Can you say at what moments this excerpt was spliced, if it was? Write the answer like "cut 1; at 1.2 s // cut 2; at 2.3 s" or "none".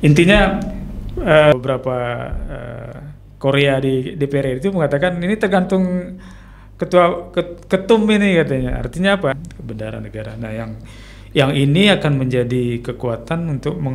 cut 1; at 1.5 s // cut 2; at 9.4 s